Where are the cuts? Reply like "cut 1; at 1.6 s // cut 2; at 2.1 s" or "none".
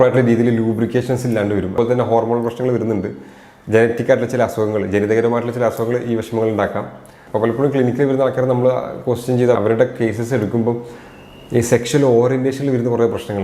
cut 1; at 1.7 s

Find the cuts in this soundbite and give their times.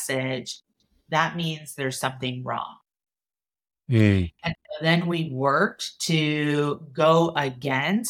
none

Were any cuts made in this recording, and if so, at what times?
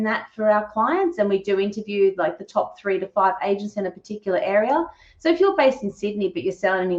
none

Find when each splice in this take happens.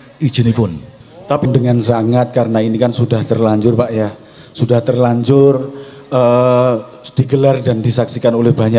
cut 1; at 1.5 s

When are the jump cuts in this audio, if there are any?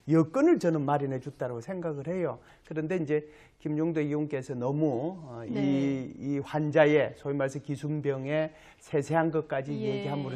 cut 1; at 9.2 s

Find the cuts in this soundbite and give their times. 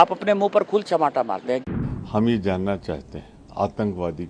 cut 1; at 1.6 s

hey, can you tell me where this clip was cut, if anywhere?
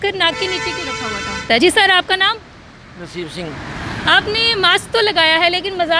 cut 1; at 1.6 s

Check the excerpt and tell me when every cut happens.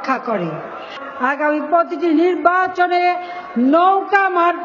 cut 1; at 1.0 s

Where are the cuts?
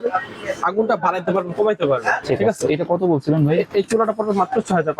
cut 1; at 2.2 s

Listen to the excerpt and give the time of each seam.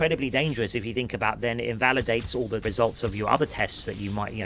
cut 1; at 2.6 s

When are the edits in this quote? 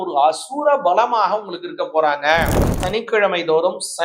cut 1; at 2.8 s

